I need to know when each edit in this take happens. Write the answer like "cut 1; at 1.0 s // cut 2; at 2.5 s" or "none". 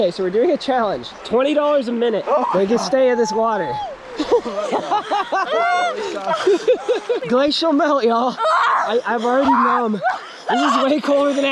cut 1; at 1.1 s // cut 2; at 2.2 s // cut 3; at 7.2 s